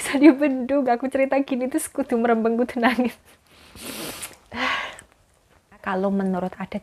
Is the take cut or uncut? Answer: cut